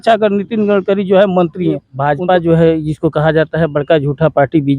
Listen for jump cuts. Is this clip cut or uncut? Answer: cut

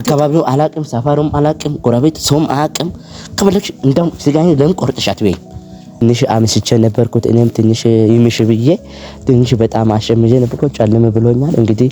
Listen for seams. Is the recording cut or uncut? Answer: cut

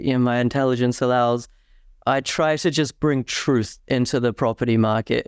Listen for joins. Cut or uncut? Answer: uncut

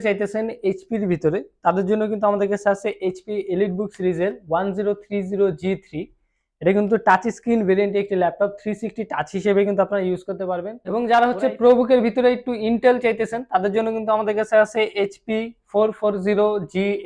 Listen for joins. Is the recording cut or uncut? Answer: cut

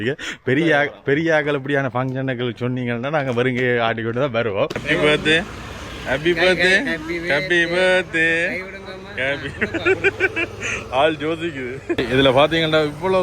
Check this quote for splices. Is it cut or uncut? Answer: cut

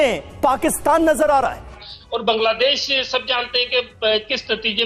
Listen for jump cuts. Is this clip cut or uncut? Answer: cut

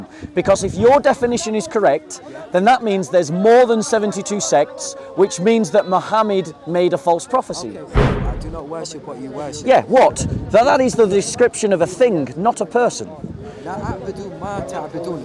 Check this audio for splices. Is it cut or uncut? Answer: cut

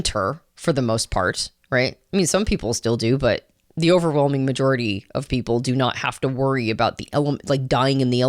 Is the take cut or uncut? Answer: uncut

